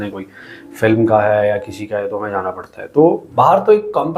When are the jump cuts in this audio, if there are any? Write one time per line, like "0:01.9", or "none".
0:03.3